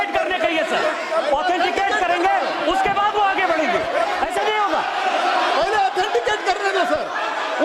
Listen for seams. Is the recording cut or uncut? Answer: uncut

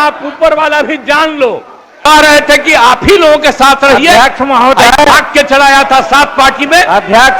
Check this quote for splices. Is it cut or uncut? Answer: cut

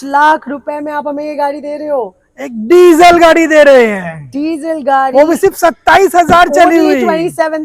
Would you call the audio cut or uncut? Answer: uncut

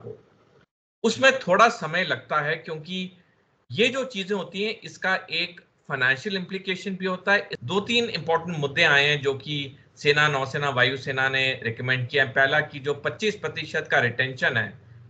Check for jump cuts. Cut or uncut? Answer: cut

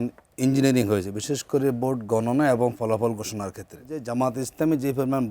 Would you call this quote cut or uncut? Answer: cut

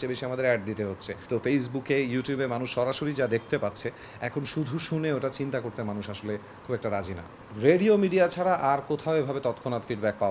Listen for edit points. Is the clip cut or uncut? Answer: cut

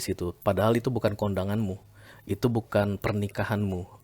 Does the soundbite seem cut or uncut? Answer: uncut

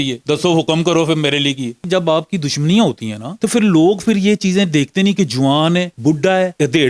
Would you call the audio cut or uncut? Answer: cut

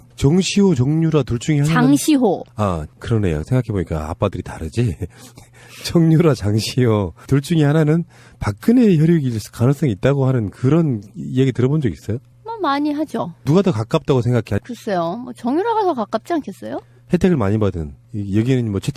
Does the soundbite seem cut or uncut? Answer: uncut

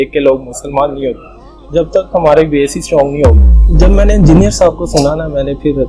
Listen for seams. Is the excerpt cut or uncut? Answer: cut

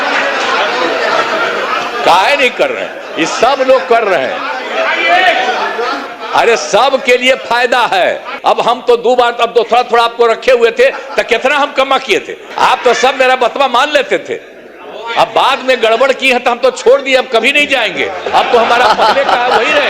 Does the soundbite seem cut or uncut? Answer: cut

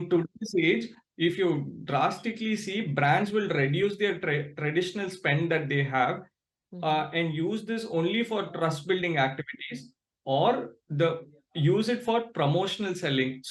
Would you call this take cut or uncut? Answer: uncut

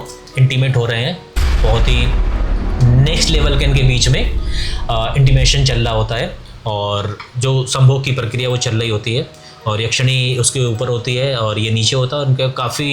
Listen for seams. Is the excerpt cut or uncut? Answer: uncut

